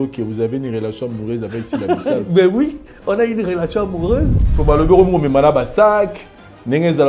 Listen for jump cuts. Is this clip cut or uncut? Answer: cut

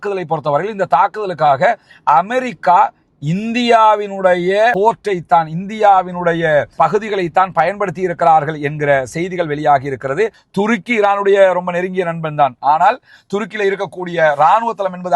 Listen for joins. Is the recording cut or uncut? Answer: cut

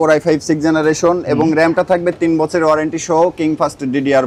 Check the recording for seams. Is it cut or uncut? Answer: uncut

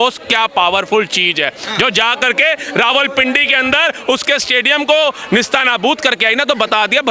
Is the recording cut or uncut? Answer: uncut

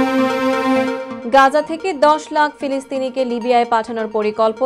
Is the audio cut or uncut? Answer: cut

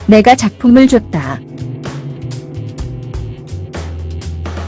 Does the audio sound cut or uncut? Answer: cut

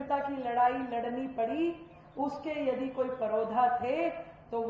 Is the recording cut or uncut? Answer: uncut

